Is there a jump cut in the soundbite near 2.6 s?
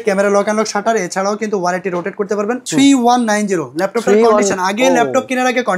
yes; 1 cut; at 2.6 s

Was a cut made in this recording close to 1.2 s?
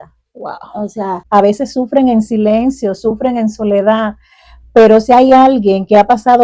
yes; 1 cut; at 1.2 s

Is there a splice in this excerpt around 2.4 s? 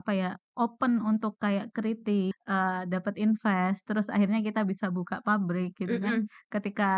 yes; 1 cut; at 2.4 s

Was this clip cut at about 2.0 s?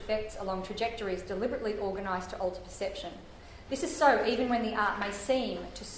no; 1 cut; at 4.6 s

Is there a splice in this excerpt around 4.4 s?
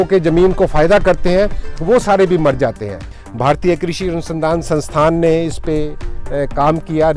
no; 1 cut; at 3.1 s

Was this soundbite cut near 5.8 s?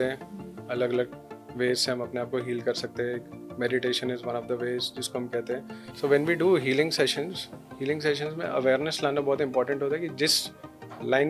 yes; 1 cut; at 5.8 s

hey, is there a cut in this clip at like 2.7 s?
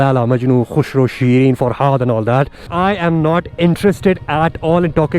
yes; 1 cut; at 2.7 s

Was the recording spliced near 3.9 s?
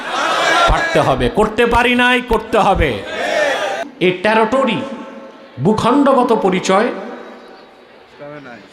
yes; 1 cut; at 3.9 s

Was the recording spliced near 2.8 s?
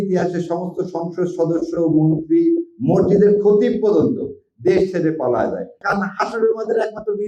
no; 1 cut; at 5.8 s

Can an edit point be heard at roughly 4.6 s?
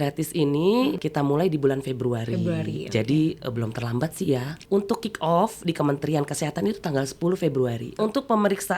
yes; 3 cuts; at 1.0 s, 4.6 s, 8.0 s

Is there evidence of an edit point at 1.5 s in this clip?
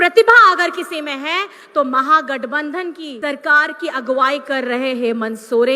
no; 1 cut; at 3.1 s

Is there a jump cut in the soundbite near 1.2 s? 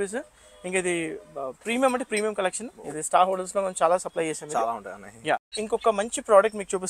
no; 1 cut; at 5.5 s

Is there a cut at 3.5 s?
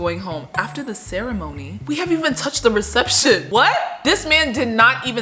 yes; 1 cut; at 3.5 s

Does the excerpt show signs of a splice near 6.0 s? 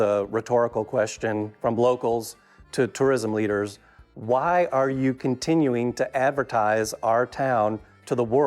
no; 1 cut; at 1.5 s

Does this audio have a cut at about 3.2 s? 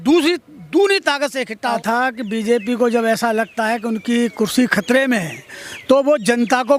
no; 1 cut; at 1.8 s

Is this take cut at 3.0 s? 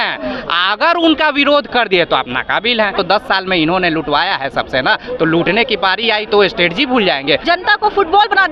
yes; 2 cuts; at 3.0 s, 7.4 s

